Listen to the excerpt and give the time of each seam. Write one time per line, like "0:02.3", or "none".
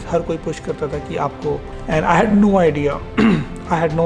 0:01.7

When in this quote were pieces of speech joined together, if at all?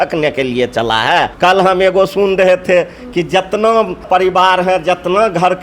0:01.3
0:04.0

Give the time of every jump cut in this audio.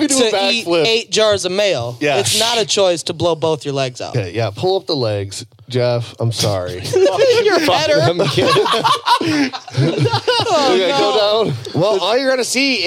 0:04.1

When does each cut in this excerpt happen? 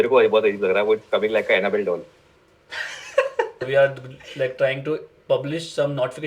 0:03.6

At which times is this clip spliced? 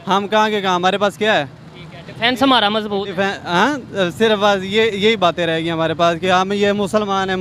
none

